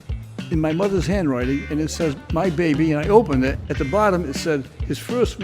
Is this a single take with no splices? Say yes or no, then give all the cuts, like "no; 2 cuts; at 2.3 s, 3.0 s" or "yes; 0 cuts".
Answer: no; 1 cut; at 3.6 s